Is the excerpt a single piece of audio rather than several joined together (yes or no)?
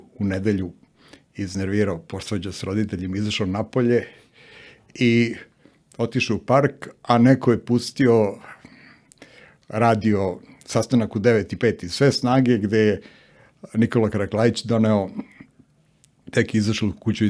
yes